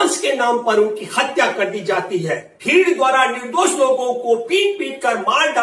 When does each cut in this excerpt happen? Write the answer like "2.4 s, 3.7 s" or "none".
2.5 s